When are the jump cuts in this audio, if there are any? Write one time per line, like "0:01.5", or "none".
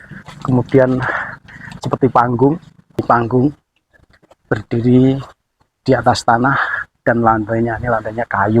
0:03.0